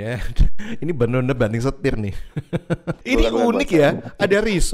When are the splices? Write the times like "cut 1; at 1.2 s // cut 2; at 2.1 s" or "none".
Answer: cut 1; at 2.9 s